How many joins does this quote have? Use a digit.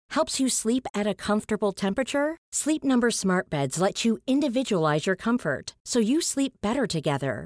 0